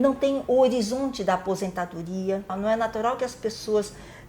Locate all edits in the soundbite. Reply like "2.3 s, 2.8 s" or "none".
2.5 s